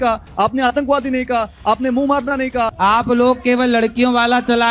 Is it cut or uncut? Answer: cut